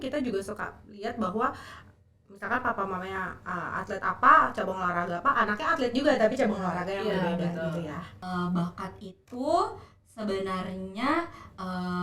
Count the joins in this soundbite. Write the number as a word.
one